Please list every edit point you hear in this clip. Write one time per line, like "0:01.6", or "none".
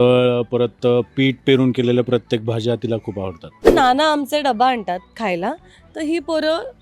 0:03.7